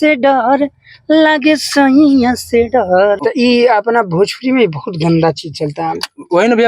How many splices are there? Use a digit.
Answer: 1